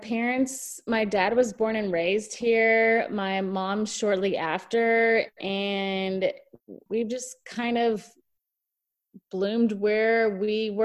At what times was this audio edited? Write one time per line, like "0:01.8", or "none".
0:06.8